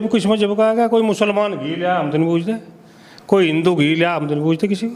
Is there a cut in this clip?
no; 0 cuts

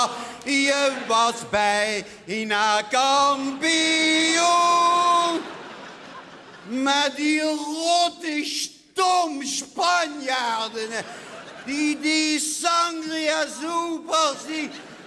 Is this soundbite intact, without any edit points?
yes; 0 cuts

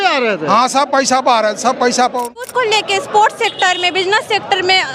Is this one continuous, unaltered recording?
no; 1 cut; at 2.4 s

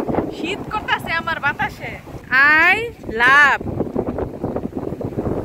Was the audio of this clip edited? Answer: yes; 1 cut; at 2.2 s

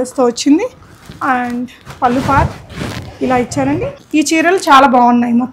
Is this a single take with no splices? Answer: no; 1 cut; at 4.0 s

